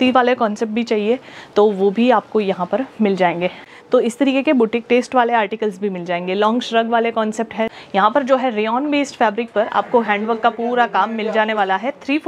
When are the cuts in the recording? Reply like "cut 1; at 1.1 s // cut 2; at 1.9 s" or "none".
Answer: cut 1; at 3.6 s // cut 2; at 7.7 s